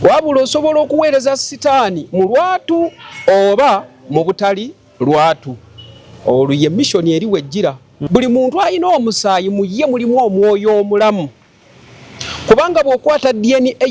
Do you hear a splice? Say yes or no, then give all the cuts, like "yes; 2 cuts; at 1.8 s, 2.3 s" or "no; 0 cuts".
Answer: yes; 1 cut; at 8.0 s